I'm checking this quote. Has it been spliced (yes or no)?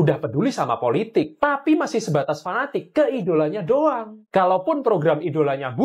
no